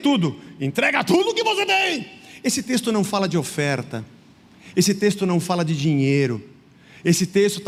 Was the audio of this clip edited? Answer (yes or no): no